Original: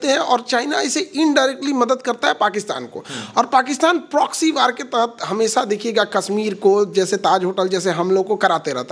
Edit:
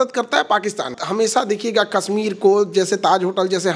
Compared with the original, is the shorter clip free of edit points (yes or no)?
no